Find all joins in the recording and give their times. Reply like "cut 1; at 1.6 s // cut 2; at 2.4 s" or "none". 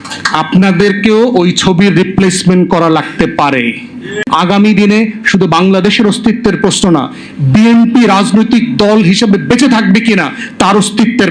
cut 1; at 4.2 s

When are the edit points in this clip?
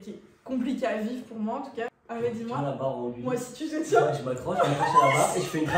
cut 1; at 2.0 s

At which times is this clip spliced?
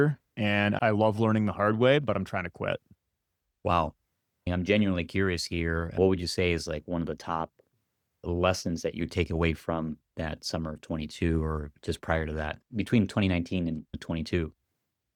none

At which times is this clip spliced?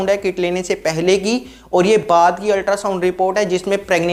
none

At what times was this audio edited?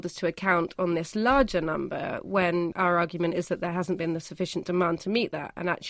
cut 1; at 2.7 s

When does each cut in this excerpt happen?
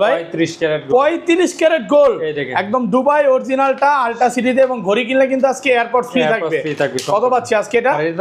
none

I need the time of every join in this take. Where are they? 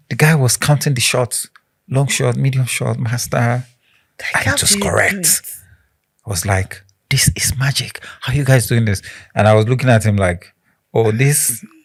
none

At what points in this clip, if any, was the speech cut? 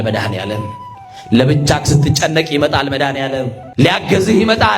cut 1; at 3.6 s

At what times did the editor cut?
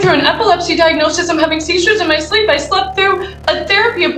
none

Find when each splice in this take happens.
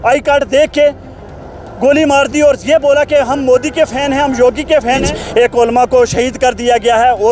cut 1; at 5.1 s

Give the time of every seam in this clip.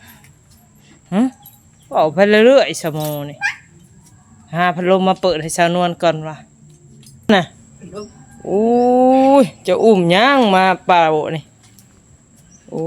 cut 1; at 7.3 s

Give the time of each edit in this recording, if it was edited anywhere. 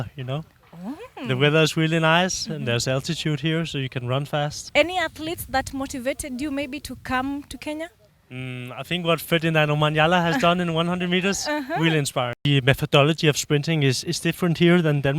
cut 1; at 4.6 s // cut 2; at 12.4 s

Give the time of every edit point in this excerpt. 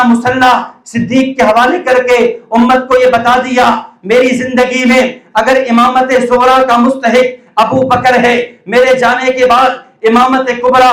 none

